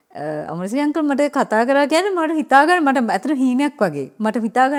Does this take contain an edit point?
no; 0 cuts

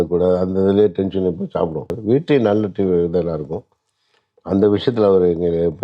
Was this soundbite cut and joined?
yes; 1 cut; at 1.9 s

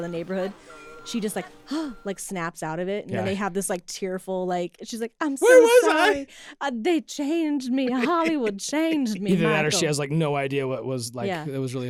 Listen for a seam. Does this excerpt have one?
no; 0 cuts

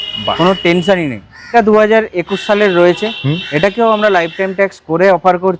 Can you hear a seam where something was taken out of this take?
yes; 1 cut; at 1.5 s

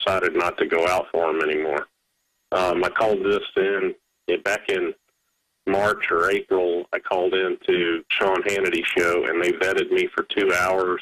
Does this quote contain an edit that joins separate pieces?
yes; 1 cut; at 7.7 s

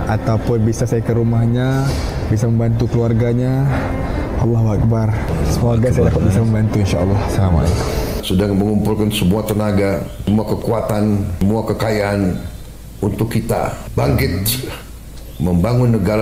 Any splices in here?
yes; 1 cut; at 8.2 s

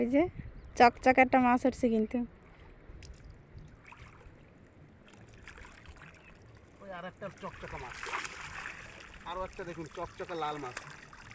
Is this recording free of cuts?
yes; 0 cuts

